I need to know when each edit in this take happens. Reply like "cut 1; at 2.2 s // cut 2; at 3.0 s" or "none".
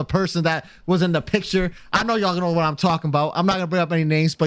none